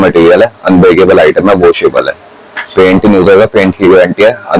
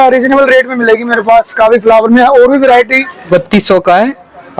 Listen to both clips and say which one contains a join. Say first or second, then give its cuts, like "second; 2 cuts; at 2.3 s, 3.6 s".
second; 1 cut; at 3.3 s